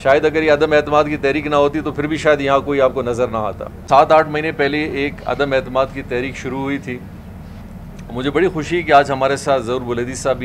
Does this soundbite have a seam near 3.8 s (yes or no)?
yes